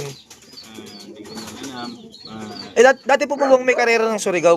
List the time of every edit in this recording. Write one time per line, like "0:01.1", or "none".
none